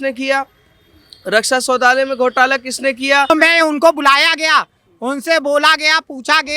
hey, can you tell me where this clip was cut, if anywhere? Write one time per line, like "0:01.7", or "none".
0:03.3